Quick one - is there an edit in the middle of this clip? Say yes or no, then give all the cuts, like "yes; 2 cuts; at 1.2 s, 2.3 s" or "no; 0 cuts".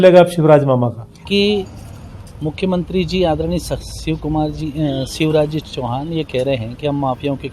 yes; 1 cut; at 1.2 s